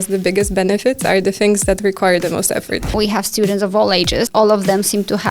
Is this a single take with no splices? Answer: no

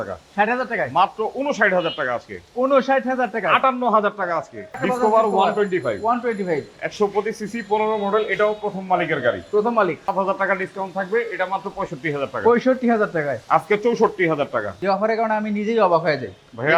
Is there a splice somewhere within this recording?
yes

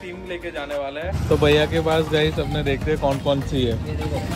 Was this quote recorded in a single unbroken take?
no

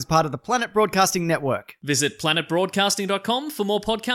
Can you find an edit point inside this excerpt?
no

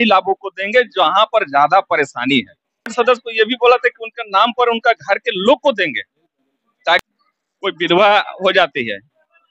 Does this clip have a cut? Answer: yes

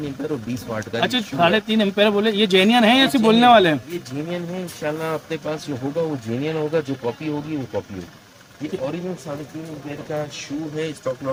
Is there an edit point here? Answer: no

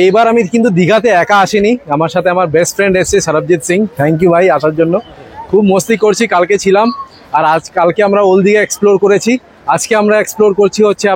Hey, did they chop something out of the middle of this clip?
no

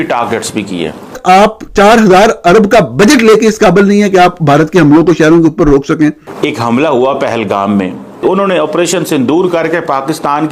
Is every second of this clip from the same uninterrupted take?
no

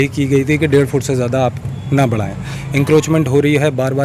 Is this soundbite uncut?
yes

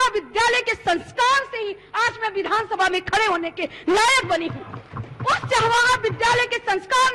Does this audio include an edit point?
no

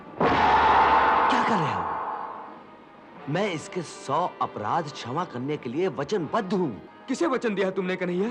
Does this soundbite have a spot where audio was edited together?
yes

